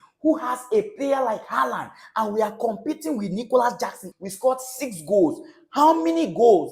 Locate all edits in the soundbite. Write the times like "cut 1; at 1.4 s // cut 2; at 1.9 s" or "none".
cut 1; at 4.1 s